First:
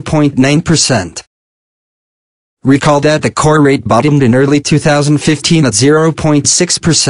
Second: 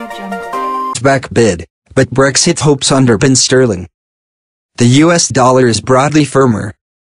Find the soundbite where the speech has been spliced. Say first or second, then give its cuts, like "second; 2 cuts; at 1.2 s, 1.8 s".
second; 1 cut; at 1.0 s